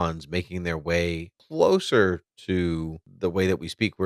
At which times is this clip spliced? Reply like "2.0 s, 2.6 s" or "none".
1.3 s, 3.0 s